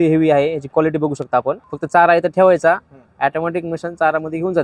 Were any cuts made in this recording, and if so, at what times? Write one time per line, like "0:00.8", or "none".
0:01.7